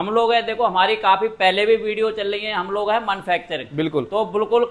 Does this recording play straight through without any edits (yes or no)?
yes